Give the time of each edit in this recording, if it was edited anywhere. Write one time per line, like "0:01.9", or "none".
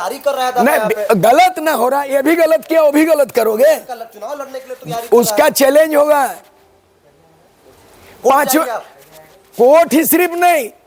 none